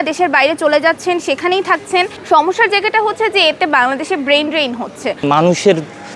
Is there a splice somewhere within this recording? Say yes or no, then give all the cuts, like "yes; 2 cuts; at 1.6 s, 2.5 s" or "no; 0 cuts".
yes; 2 cuts; at 2.2 s, 5.1 s